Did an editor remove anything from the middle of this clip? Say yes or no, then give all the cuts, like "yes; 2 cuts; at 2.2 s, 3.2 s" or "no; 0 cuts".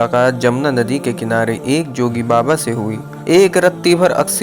yes; 1 cut; at 3.1 s